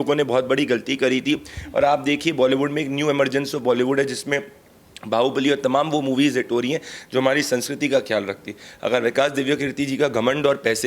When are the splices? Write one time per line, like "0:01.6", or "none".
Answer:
none